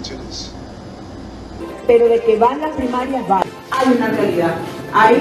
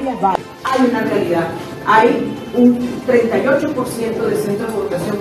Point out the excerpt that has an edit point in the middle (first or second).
first